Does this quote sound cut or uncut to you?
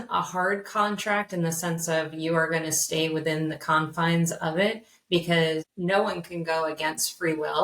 cut